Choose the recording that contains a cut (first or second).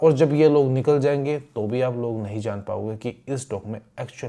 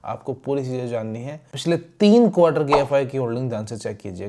second